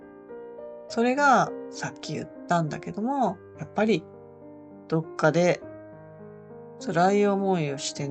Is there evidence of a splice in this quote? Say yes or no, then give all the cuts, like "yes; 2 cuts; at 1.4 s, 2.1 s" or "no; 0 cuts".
yes; 1 cut; at 0.9 s